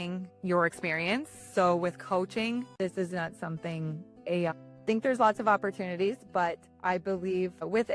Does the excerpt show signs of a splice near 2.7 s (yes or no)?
yes